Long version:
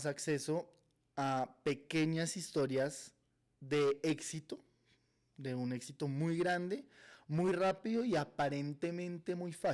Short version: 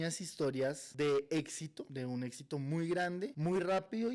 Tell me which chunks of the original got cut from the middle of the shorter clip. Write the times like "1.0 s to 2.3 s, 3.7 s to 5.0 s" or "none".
3.0 s to 3.6 s, 4.5 s to 5.3 s, 6.8 s to 7.3 s